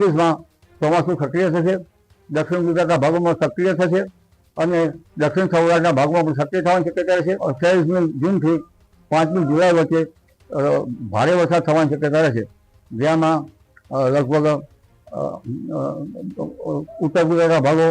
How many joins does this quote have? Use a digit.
1